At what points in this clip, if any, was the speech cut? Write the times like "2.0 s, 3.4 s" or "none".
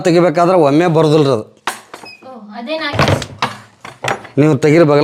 none